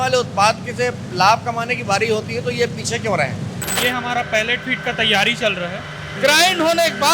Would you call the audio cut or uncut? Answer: cut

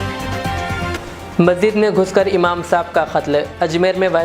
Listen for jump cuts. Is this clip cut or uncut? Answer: cut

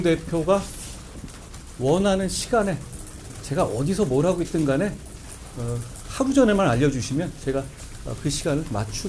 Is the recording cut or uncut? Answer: uncut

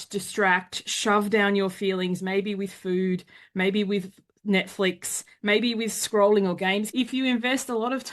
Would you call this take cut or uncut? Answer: cut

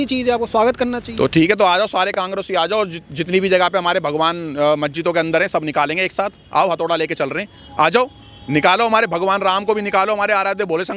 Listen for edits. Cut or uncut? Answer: uncut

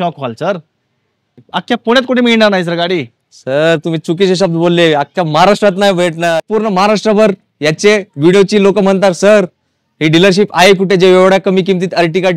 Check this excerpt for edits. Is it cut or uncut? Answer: cut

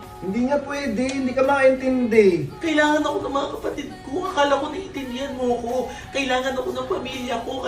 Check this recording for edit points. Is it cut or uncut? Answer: cut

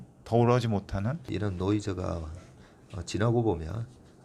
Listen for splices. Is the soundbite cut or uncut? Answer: cut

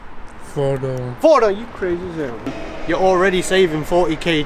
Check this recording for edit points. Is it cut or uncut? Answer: cut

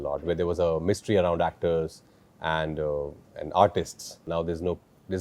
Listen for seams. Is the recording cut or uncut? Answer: cut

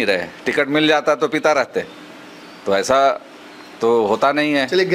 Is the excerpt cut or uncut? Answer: uncut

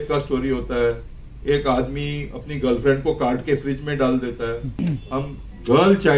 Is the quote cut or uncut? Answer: cut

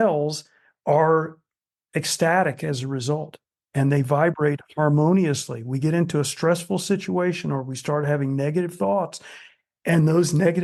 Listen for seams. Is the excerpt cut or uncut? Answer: uncut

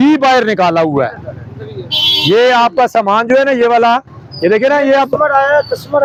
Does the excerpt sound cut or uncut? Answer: uncut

